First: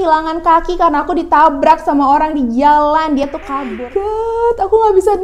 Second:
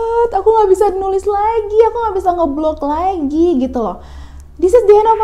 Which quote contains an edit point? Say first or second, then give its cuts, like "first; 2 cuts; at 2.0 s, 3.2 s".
first; 1 cut; at 3.2 s